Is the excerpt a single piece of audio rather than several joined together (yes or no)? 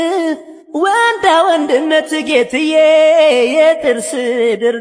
yes